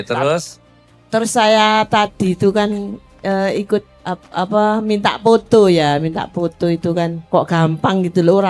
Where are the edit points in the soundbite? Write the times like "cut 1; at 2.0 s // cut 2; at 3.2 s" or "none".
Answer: cut 1; at 4.0 s // cut 2; at 7.2 s

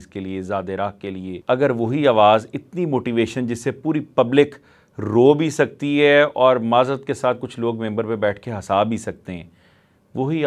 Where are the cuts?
cut 1; at 1.3 s

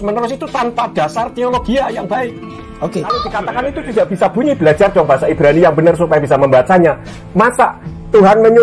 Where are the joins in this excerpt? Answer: cut 1; at 3.4 s

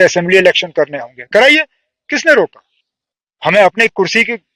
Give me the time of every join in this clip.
none

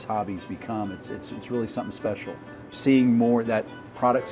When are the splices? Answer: cut 1; at 2.7 s

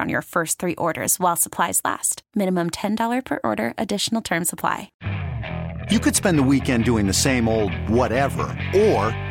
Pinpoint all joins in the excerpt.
cut 1; at 4.9 s

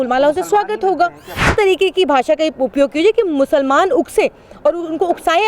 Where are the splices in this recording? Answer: cut 1; at 1.5 s

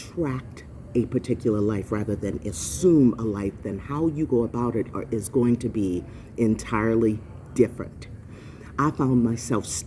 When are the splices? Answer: none

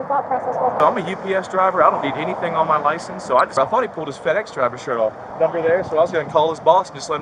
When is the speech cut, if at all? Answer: cut 1; at 0.8 s // cut 2; at 3.5 s // cut 3; at 5.2 s

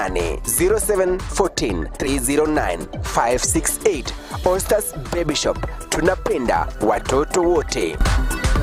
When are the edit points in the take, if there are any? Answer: cut 1; at 2.0 s

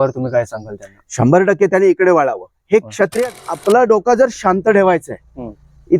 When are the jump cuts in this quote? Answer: cut 1; at 3.4 s

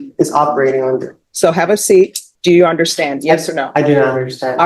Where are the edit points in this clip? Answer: cut 1; at 1.2 s // cut 2; at 2.3 s

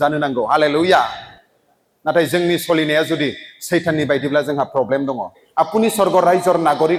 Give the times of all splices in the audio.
none

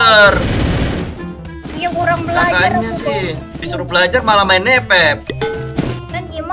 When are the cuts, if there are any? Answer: cut 1; at 3.6 s

